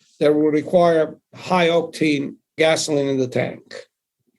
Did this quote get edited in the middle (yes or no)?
yes